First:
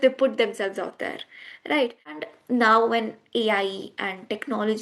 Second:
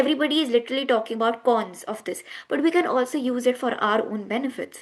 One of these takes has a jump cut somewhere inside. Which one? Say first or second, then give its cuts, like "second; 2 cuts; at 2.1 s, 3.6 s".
first; 1 cut; at 2.2 s